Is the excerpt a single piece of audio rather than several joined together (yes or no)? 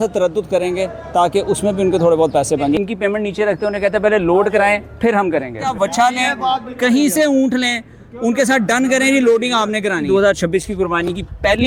no